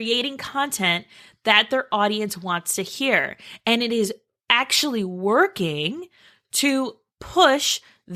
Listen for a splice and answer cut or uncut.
uncut